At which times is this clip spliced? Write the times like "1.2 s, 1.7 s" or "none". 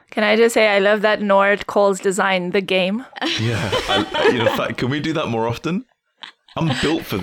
none